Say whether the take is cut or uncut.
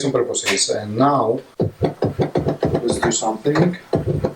cut